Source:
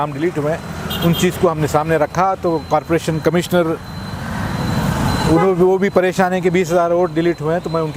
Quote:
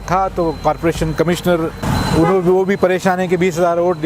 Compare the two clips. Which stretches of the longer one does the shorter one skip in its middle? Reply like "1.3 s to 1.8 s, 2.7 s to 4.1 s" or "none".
3.9 s to 5.0 s